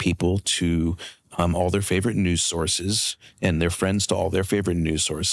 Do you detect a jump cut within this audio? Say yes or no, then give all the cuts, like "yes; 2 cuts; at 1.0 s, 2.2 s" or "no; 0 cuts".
no; 0 cuts